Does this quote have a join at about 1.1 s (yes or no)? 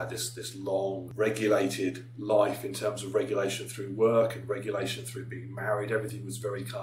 yes